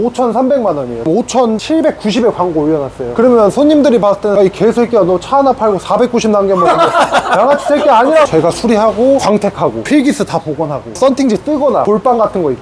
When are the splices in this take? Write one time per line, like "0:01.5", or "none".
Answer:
0:01.0
0:04.4
0:08.3